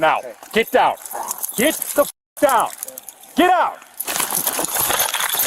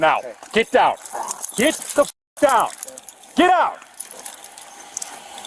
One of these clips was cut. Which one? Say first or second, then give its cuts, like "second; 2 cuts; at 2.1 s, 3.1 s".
first; 1 cut; at 4.1 s